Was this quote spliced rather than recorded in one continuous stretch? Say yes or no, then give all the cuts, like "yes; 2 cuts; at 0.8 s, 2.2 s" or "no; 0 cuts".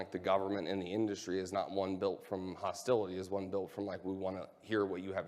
no; 0 cuts